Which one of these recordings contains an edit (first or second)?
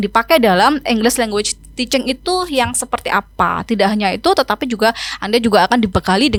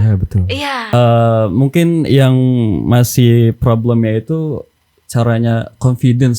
second